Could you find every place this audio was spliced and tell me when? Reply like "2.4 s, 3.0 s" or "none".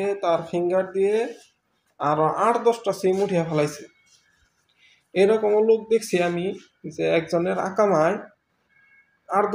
none